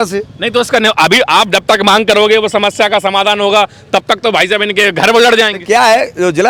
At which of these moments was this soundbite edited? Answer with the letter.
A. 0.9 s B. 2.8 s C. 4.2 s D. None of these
D